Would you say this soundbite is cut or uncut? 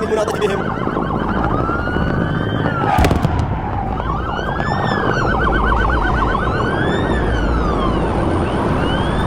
uncut